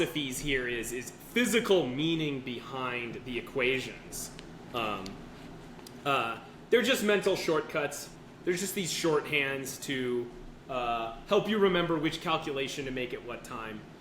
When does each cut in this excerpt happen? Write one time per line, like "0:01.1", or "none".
0:08.0

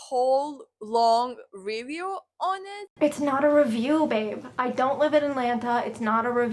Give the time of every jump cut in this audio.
0:02.9

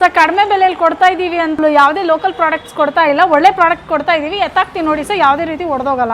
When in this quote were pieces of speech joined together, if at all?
0:01.6

